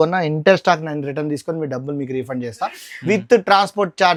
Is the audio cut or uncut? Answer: uncut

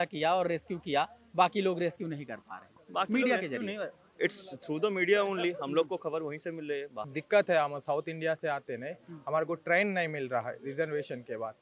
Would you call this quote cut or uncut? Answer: cut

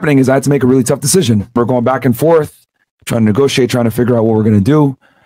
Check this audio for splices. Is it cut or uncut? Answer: cut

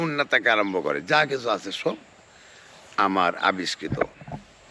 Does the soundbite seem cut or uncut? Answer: uncut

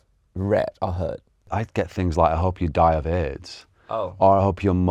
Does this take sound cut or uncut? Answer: cut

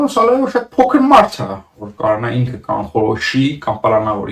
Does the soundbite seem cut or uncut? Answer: uncut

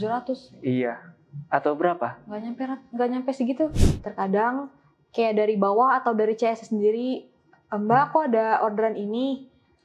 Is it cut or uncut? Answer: cut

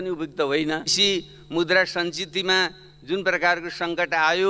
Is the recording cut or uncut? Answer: cut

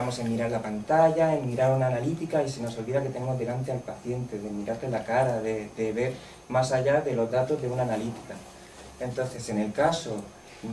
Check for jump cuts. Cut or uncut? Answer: uncut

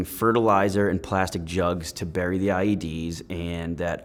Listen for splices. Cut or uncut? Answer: uncut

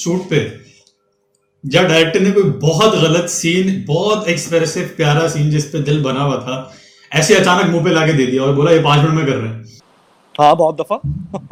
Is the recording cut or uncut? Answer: uncut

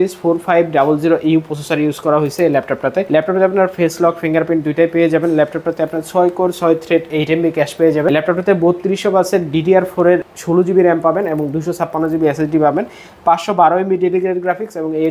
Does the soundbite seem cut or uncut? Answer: cut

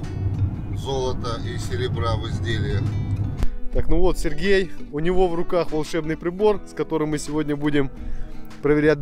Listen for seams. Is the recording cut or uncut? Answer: cut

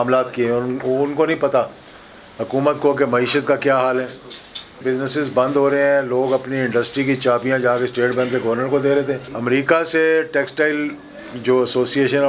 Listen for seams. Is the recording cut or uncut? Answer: cut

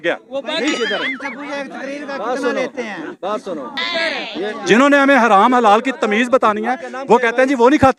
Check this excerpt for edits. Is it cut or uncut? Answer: uncut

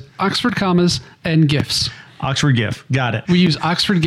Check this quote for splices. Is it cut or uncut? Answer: uncut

